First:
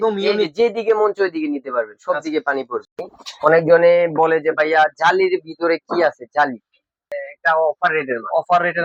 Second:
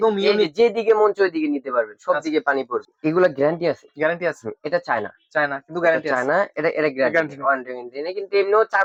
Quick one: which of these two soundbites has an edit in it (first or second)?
first